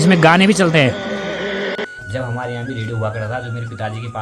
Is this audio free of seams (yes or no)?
no